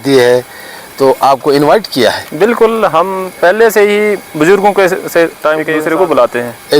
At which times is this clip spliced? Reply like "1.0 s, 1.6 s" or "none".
5.7 s